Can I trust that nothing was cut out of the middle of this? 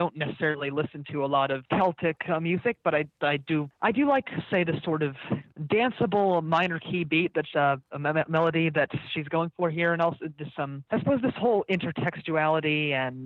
no; 4 cuts; at 1.6 s, 3.7 s, 5.5 s, 10.8 s

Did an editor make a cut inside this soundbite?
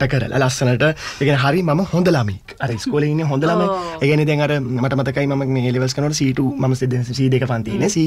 no; 0 cuts

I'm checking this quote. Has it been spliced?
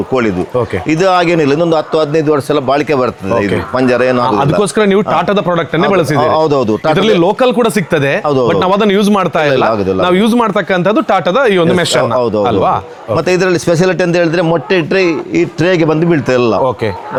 no; 0 cuts

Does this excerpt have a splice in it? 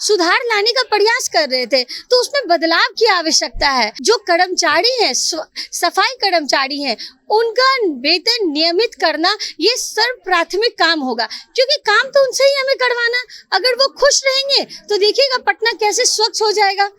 yes; 1 cut; at 3.9 s

